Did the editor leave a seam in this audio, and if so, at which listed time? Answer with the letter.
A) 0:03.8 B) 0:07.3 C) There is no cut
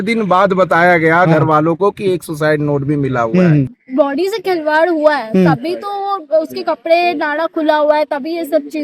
A